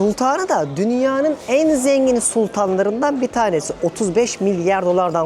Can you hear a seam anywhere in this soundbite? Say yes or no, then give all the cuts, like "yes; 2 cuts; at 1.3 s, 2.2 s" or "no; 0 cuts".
no; 0 cuts